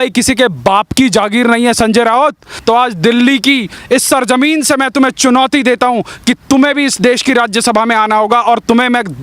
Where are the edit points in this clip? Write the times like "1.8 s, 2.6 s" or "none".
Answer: 2.5 s